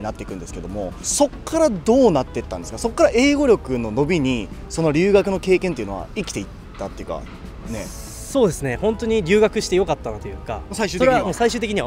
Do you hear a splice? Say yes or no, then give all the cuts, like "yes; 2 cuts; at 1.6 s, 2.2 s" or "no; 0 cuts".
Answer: no; 0 cuts